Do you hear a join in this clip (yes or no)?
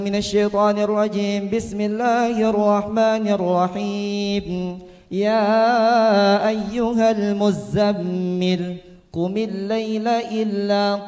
no